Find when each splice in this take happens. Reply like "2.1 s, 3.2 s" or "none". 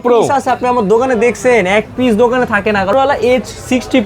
2.9 s